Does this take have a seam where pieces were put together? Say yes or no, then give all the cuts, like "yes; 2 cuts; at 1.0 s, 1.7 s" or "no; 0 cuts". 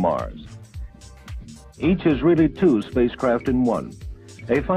yes; 1 cut; at 2.6 s